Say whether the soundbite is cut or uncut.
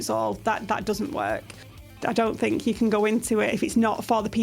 cut